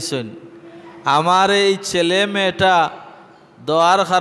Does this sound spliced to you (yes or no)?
no